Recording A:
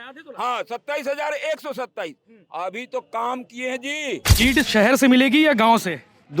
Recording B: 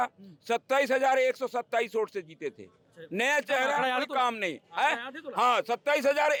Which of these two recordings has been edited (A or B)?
A